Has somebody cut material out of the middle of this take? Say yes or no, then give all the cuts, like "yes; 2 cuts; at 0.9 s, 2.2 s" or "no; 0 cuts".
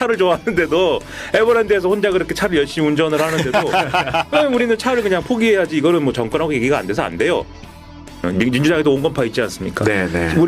yes; 1 cut; at 7.7 s